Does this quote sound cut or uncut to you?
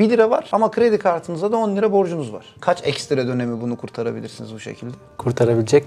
uncut